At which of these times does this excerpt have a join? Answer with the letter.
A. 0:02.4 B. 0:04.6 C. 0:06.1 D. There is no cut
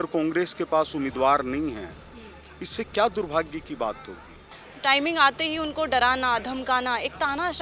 B